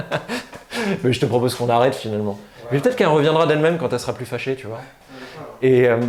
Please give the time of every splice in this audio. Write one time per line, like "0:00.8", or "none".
none